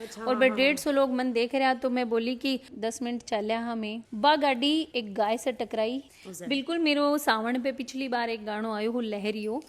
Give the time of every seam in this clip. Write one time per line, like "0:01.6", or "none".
0:02.7
0:06.1